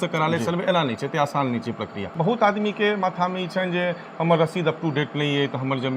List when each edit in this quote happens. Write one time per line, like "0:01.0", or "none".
0:02.0